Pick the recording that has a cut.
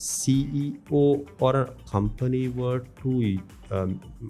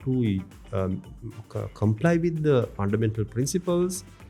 second; 1 cut; at 2.8 s

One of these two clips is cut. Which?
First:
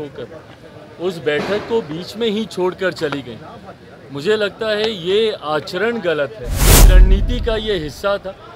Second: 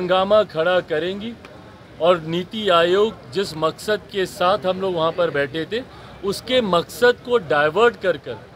first; 1 cut; at 6.9 s

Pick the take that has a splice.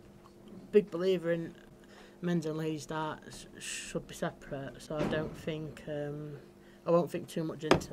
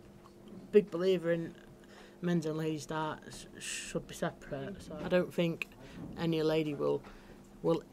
second; 1 cut; at 4.9 s

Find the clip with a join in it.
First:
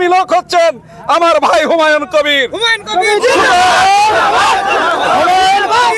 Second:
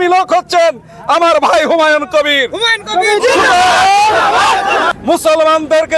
second; 1 cut; at 4.9 s

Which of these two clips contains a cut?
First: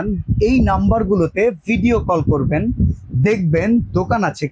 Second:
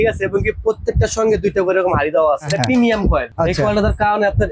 second; 2 cuts; at 2.5 s, 3.3 s

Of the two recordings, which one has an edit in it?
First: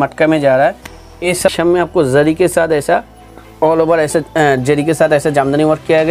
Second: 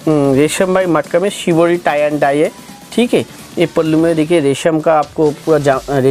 first; 1 cut; at 1.6 s

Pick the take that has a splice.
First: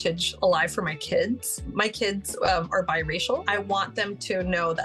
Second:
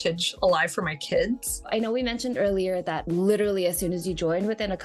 second; 1 cut; at 1.7 s

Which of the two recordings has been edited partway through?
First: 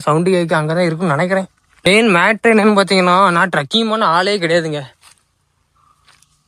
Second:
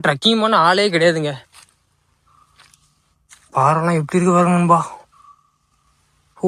first; 1 cut; at 1.9 s

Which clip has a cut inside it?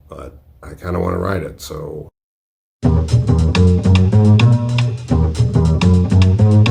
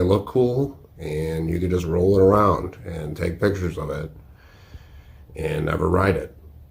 first; 1 cut; at 2.3 s

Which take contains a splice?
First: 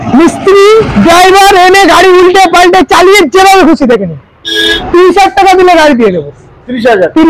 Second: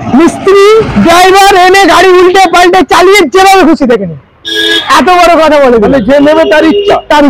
first; 1 cut; at 4.7 s

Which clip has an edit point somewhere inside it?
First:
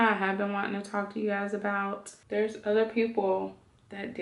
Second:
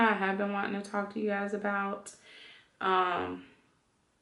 first; 1 cut; at 2.1 s

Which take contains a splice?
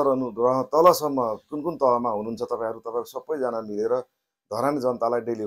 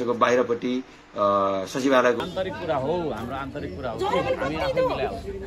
second; 1 cut; at 2.2 s

